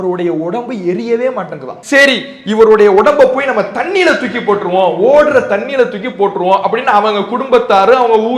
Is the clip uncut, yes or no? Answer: no